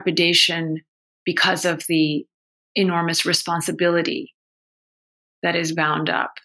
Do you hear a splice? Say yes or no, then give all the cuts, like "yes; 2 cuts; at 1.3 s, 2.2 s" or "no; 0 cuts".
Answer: no; 0 cuts